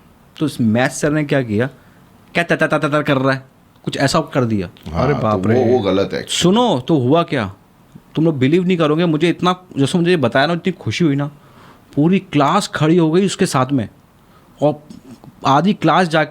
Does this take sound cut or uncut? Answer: uncut